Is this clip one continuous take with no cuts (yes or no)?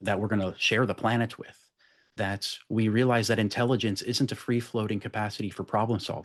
yes